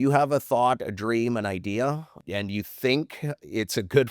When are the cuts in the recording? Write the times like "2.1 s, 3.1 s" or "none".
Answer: 2.1 s